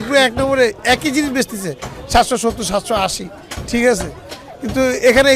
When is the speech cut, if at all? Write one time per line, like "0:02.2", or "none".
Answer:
none